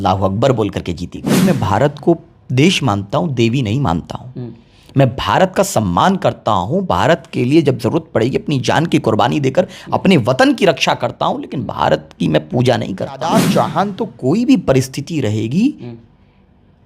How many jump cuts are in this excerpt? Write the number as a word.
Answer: two